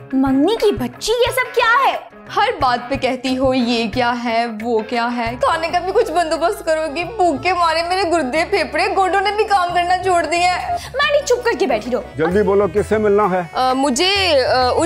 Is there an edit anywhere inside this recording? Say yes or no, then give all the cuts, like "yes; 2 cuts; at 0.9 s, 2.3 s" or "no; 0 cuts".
yes; 2 cuts; at 5.4 s, 12.0 s